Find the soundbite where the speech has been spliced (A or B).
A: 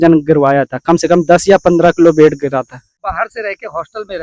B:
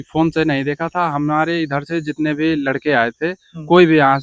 A